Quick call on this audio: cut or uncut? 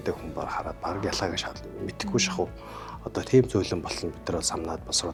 uncut